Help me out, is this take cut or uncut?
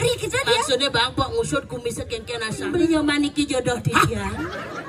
cut